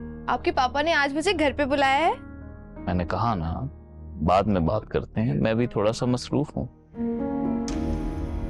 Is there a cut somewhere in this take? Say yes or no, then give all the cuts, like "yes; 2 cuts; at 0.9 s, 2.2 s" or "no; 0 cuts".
no; 0 cuts